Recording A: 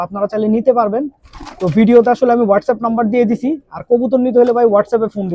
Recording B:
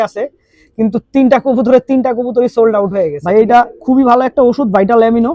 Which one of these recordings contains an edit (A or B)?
B